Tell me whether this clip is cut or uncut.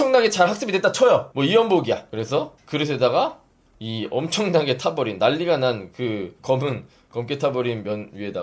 cut